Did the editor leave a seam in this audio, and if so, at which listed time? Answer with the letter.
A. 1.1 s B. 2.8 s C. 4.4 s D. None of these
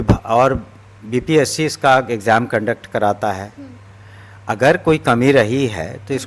D